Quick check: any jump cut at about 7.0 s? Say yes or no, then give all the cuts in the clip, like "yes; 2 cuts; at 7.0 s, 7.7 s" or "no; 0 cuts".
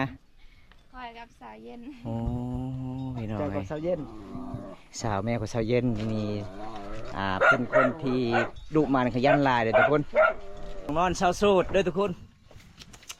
no; 1 cut; at 10.9 s